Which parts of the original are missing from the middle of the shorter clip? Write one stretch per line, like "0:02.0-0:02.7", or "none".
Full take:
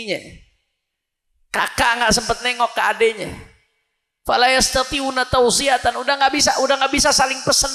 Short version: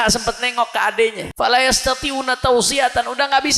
0:03.3-0:04.1